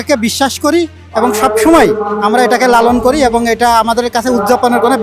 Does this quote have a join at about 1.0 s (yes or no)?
no